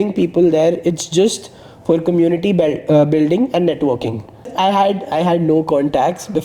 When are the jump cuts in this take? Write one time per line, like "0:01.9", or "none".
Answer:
0:04.5